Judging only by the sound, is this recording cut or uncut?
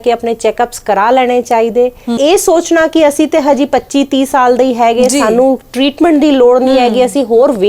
cut